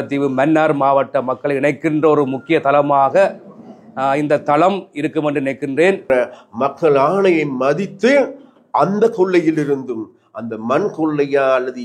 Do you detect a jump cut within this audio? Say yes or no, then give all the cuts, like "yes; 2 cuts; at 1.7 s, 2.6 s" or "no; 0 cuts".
yes; 1 cut; at 6.1 s